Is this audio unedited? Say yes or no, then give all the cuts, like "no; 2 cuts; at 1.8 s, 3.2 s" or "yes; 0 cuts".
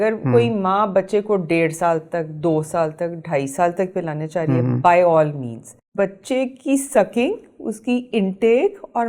no; 1 cut; at 5.9 s